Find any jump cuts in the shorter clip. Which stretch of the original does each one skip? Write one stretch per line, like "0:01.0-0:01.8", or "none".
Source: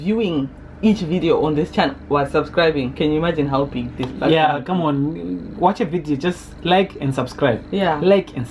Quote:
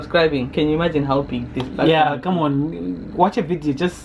none